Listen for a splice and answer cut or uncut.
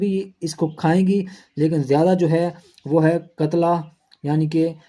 uncut